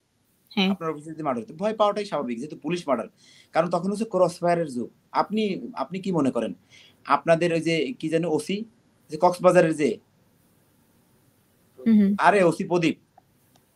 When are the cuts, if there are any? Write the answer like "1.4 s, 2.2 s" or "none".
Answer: none